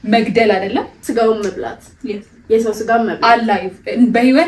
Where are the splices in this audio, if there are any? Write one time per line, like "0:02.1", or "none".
0:00.9